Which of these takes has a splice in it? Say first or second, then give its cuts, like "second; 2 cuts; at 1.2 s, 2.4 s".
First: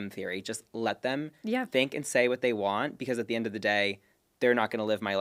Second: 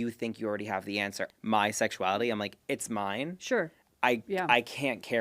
second; 1 cut; at 1.2 s